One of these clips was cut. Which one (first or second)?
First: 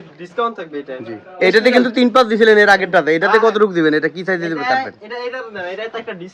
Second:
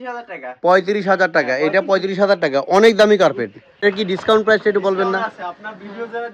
second